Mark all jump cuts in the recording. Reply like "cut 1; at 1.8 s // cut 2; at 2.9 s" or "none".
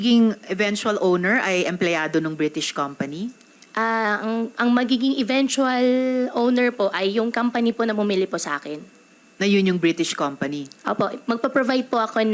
none